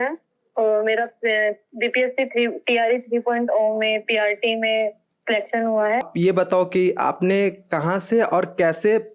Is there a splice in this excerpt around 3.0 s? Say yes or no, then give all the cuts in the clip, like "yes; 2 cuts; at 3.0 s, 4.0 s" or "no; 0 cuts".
no; 1 cut; at 6.0 s